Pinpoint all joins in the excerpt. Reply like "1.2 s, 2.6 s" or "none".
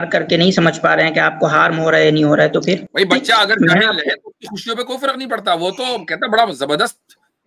2.9 s